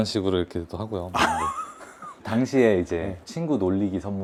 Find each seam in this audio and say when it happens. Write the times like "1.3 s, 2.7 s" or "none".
none